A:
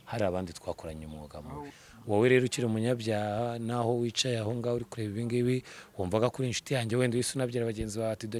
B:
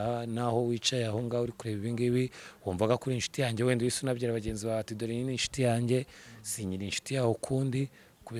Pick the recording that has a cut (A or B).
A